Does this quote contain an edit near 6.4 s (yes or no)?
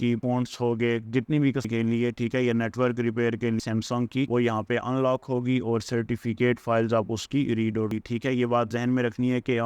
no